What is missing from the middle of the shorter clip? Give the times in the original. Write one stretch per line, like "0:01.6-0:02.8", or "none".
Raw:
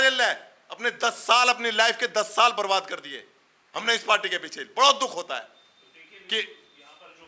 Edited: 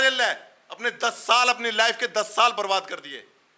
none